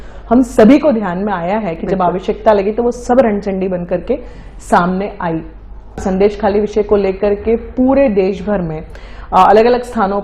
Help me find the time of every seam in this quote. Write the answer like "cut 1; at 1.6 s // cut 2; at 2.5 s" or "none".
cut 1; at 5.9 s